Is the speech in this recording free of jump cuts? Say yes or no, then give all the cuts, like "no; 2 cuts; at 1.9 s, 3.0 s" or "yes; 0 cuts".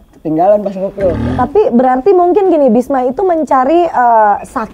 no; 1 cut; at 1.2 s